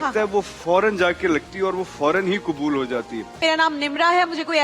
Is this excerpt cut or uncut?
cut